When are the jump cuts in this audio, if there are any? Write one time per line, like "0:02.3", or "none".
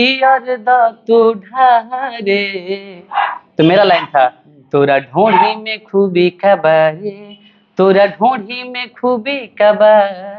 none